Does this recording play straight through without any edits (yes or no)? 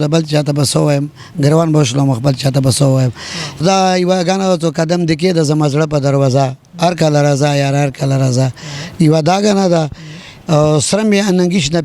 no